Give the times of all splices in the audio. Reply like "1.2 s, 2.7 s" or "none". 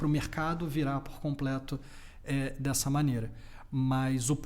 none